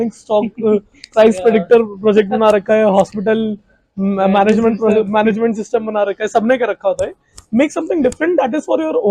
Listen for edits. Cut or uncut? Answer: uncut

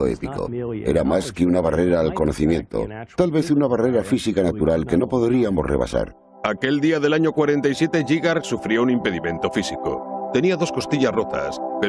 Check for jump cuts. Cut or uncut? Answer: uncut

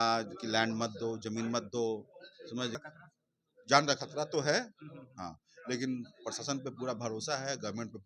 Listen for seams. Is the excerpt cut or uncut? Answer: cut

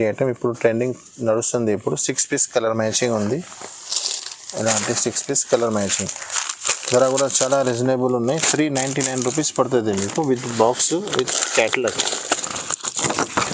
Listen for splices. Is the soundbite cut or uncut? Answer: uncut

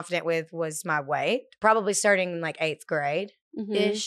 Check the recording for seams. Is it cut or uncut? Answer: cut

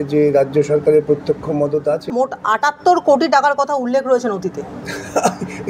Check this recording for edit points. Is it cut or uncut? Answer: cut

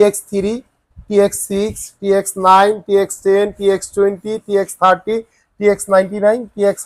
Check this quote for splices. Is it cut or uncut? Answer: uncut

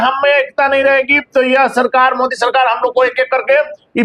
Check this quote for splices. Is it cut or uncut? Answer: uncut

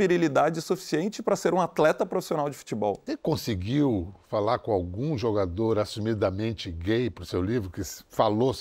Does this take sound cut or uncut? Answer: cut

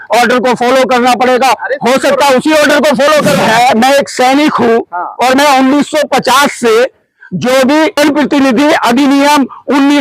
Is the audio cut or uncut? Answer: cut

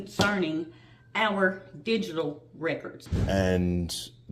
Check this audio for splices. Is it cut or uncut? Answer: cut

